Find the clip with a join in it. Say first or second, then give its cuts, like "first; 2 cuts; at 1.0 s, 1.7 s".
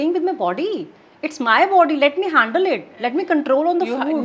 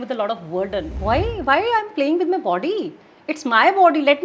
second; 1 cut; at 0.9 s